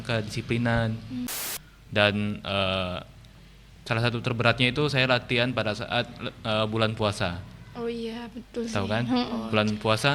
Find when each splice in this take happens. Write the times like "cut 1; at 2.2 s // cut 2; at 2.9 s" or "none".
cut 1; at 1.4 s